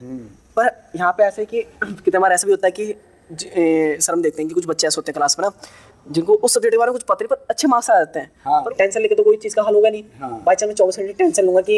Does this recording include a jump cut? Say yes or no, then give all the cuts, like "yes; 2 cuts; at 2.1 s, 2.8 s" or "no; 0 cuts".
yes; 1 cut; at 8.6 s